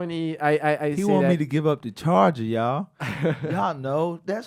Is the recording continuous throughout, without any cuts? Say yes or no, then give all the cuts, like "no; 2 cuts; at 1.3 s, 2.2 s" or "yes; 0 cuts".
yes; 0 cuts